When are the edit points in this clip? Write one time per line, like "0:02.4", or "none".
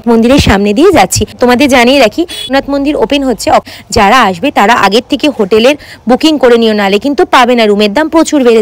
0:01.4
0:02.5
0:03.7